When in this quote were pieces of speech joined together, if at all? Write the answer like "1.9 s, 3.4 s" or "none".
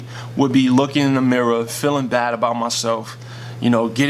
none